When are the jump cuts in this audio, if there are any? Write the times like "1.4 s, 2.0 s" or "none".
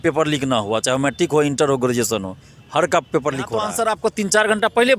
3.6 s